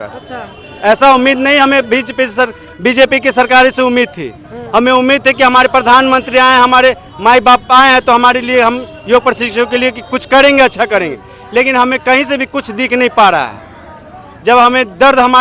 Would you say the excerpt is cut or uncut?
uncut